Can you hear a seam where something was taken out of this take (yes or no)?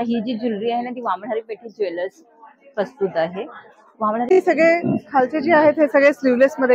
yes